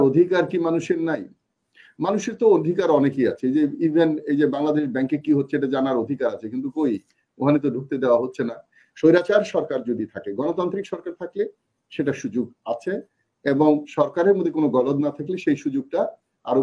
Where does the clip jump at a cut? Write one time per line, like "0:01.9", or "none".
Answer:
none